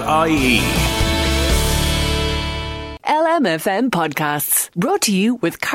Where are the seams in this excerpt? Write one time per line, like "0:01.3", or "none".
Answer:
none